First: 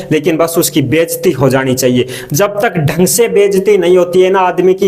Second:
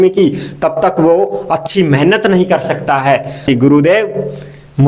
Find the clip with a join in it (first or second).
second